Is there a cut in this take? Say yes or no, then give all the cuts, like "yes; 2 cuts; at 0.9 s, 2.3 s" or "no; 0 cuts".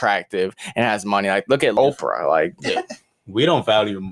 yes; 1 cut; at 1.8 s